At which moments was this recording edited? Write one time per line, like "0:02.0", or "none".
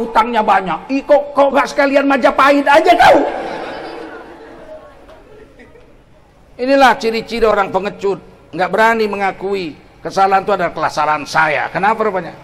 0:06.1